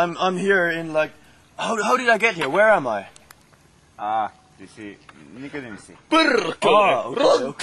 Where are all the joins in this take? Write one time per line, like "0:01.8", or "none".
none